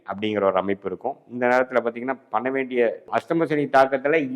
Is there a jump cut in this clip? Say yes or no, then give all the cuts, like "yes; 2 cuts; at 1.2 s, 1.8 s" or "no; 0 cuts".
yes; 1 cut; at 3.1 s